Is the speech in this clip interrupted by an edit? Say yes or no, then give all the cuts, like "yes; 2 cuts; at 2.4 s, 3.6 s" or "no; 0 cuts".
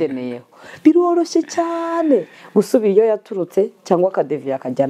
no; 0 cuts